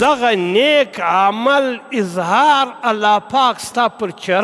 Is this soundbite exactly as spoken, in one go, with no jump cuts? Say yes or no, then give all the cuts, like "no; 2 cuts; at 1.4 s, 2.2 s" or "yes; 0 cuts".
yes; 0 cuts